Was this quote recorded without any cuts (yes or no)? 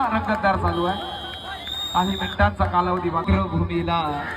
no